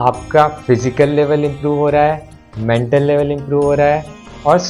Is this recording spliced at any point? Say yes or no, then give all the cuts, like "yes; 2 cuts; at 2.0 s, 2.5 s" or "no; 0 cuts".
no; 0 cuts